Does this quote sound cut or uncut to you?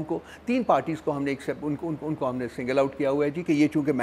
uncut